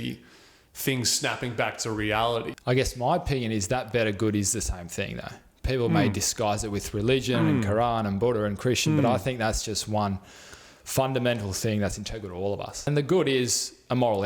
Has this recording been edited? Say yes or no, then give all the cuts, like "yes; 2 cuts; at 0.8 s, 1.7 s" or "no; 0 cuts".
yes; 2 cuts; at 2.5 s, 12.9 s